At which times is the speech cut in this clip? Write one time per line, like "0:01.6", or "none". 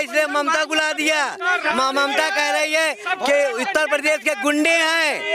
none